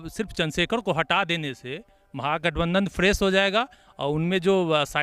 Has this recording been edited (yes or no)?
no